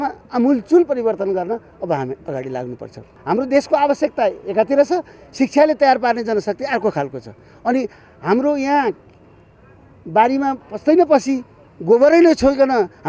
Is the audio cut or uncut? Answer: cut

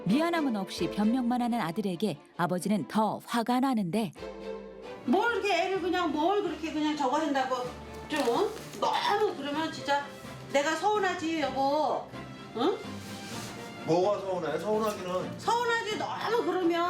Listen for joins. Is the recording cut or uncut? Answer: cut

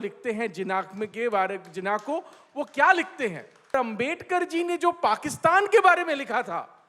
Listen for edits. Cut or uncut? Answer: cut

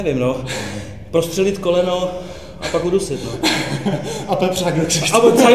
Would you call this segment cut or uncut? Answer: uncut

